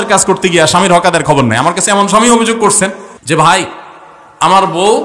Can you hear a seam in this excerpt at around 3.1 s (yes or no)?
yes